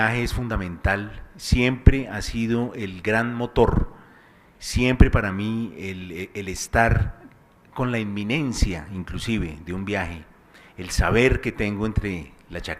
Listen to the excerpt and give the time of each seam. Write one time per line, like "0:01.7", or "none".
0:06.8